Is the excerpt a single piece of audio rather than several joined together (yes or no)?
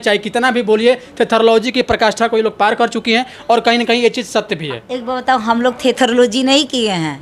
yes